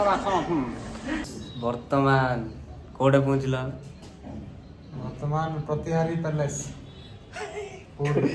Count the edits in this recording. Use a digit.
2